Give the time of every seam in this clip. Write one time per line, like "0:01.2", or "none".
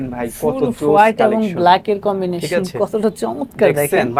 none